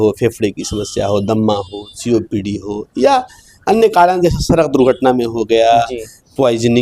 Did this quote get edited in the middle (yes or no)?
no